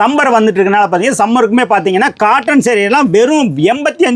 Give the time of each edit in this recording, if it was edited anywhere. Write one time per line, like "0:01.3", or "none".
none